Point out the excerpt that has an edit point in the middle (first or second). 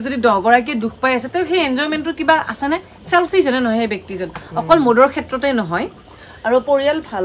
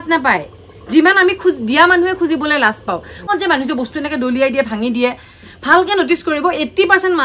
second